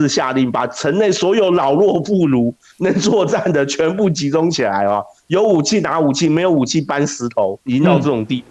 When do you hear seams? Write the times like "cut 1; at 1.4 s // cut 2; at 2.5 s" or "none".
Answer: none